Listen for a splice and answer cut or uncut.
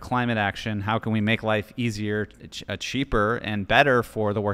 uncut